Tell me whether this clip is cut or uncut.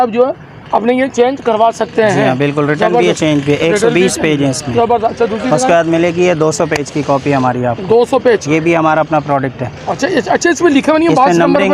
uncut